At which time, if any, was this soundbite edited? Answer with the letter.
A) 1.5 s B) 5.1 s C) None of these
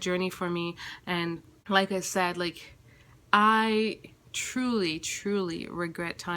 A